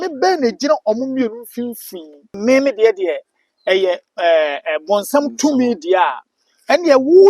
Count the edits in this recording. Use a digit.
1